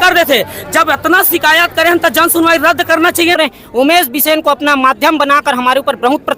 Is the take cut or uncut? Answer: cut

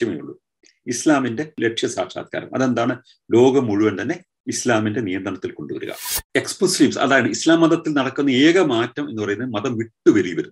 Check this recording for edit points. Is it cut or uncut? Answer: cut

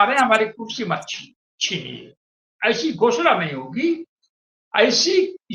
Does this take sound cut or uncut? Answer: cut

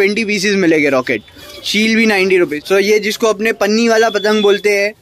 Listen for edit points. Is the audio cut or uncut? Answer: cut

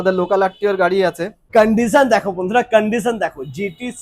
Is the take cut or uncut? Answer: cut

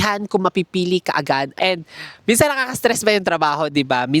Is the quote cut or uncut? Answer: cut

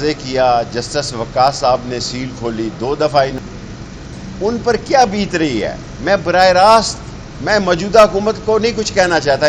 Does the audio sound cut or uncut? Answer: cut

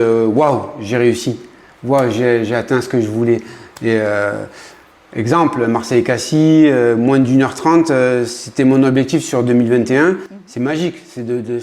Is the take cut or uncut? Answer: cut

